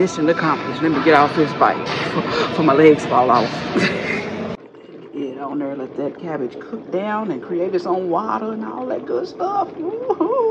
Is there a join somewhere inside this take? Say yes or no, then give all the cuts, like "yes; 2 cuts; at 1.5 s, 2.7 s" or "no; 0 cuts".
yes; 1 cut; at 4.6 s